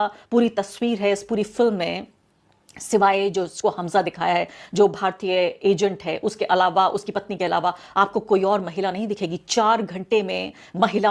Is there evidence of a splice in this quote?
yes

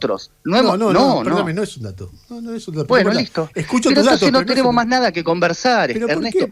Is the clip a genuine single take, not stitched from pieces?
yes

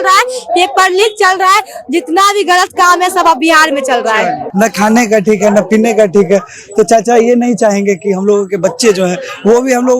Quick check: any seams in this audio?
yes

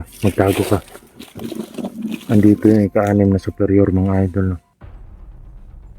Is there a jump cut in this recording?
yes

